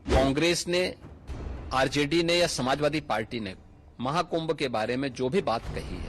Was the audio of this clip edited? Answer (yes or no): no